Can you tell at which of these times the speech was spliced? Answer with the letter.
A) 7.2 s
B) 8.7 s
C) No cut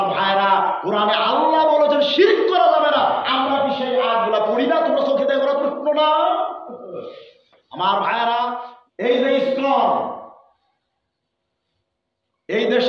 B